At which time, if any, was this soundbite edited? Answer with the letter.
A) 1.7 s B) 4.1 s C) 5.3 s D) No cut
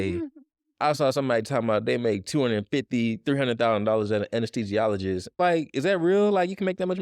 C